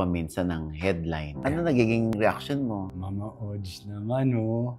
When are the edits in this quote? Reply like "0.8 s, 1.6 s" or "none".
1.4 s, 2.9 s